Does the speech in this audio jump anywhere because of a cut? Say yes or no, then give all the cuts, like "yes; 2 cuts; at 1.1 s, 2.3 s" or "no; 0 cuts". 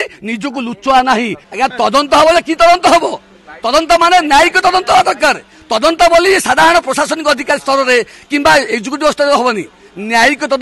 yes; 1 cut; at 1.5 s